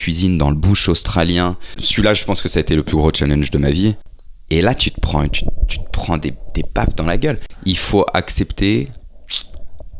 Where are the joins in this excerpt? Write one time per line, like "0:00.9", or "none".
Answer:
0:01.8
0:04.1
0:07.5

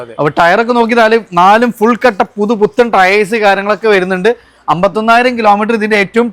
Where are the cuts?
none

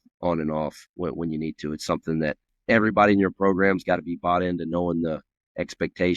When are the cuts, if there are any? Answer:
0:02.5

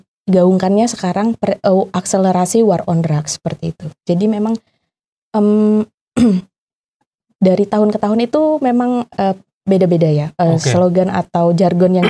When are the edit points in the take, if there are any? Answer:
none

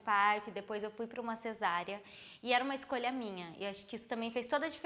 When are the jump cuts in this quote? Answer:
none

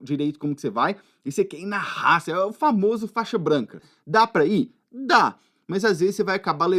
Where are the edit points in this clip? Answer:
0:03.8

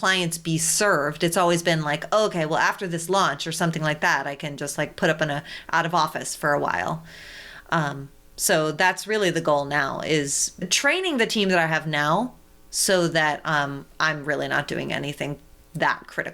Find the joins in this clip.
0:10.7

